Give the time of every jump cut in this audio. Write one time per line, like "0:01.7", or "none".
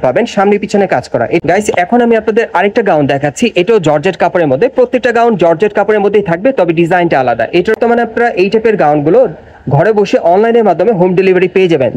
0:01.4
0:07.8